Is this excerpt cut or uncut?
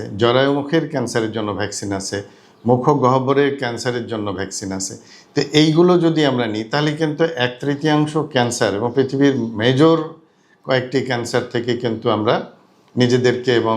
uncut